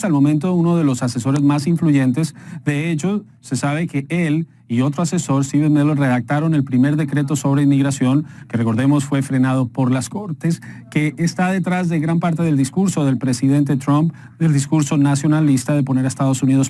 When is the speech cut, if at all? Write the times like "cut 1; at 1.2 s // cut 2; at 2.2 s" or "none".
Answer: cut 1; at 1.7 s